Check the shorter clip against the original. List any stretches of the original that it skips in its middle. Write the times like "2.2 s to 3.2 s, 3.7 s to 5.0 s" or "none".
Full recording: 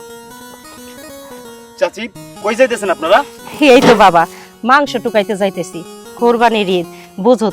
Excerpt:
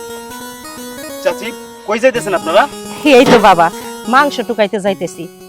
1.2 s to 1.8 s